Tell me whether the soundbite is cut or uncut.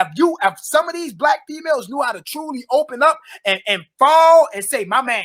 uncut